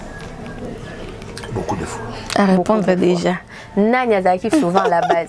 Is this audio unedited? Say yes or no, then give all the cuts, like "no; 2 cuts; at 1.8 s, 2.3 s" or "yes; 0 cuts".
yes; 0 cuts